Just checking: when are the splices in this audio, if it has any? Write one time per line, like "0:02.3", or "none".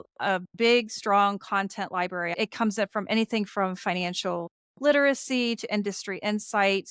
0:02.3